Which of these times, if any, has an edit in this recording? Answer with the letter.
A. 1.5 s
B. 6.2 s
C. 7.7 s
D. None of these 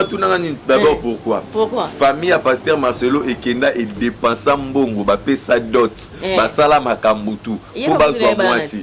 D